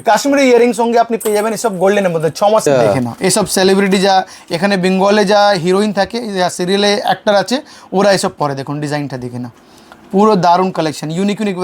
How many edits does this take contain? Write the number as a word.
one